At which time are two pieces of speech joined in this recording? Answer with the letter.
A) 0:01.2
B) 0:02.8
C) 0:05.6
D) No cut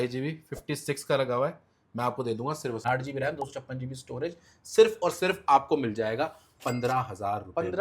B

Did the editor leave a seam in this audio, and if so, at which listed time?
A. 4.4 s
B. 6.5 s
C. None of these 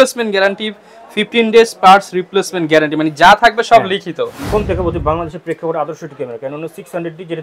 A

